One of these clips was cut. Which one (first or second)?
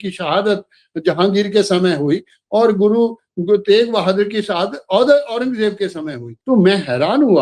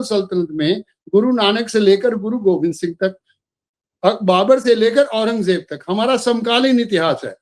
first